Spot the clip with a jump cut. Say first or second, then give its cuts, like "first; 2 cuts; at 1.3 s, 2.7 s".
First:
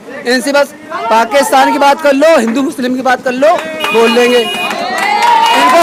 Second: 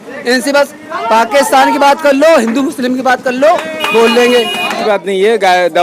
second; 1 cut; at 4.8 s